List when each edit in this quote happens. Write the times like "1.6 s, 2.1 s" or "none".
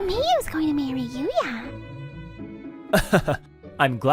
1.8 s